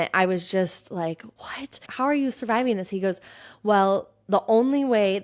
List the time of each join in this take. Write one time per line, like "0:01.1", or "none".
0:01.9